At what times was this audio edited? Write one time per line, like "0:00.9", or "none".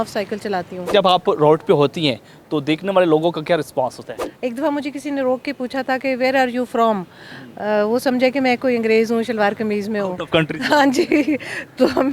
0:00.9
0:04.2